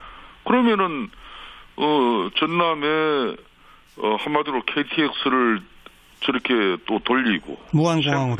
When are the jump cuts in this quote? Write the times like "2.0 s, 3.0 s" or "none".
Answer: none